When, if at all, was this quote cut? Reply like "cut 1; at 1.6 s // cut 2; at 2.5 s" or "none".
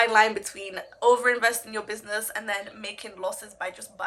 none